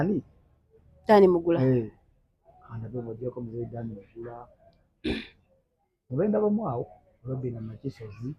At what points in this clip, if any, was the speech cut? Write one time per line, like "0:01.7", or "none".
none